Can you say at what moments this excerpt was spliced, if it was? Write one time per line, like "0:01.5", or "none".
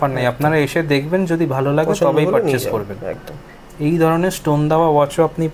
none